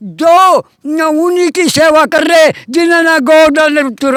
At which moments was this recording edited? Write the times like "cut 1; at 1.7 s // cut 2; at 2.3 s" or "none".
none